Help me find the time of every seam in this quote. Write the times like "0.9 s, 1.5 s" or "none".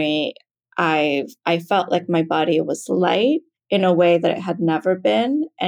3.5 s